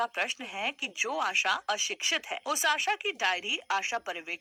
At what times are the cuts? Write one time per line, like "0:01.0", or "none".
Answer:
none